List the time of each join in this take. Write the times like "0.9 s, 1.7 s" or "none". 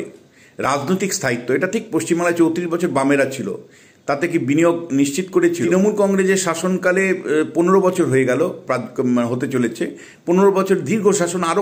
5.7 s